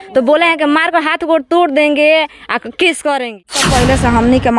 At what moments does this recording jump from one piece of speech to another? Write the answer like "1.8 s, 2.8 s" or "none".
3.7 s

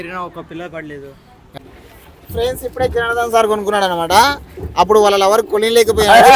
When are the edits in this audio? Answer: 1.4 s

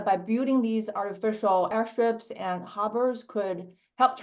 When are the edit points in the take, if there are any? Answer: 1.7 s

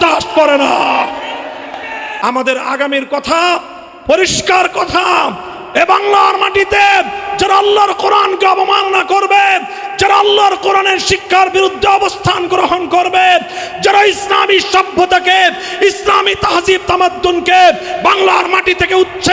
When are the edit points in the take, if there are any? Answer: 2.1 s

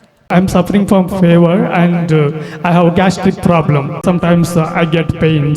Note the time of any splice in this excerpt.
4.0 s

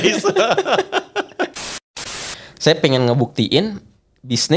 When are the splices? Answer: 2.0 s

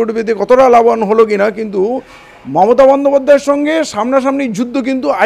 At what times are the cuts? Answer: none

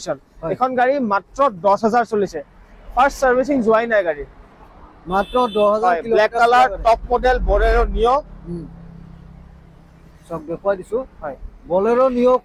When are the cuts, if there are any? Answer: none

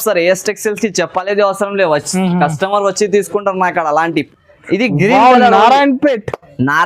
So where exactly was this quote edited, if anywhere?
4.3 s

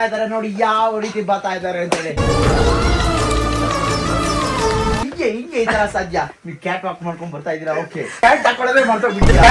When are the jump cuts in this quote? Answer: 5.0 s, 6.3 s, 8.2 s

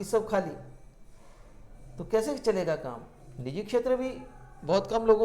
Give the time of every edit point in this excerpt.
none

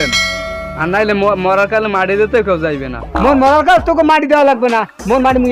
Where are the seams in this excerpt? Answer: 3.0 s

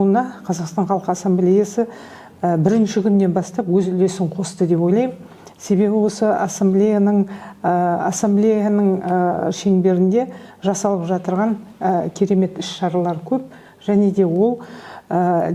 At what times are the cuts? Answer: none

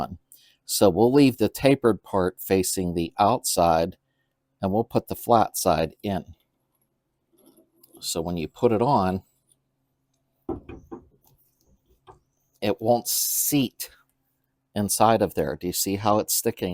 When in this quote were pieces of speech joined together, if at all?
none

